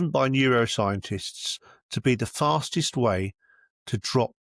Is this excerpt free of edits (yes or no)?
yes